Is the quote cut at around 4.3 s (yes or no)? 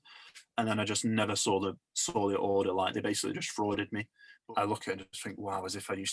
yes